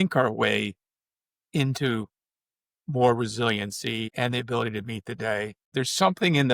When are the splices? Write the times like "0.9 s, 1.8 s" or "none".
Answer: 4.1 s, 5.6 s